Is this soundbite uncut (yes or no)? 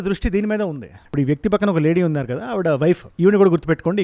no